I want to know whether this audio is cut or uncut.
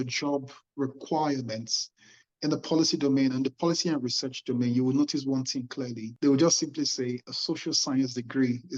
uncut